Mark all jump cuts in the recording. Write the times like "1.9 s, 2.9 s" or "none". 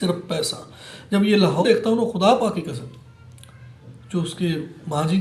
1.6 s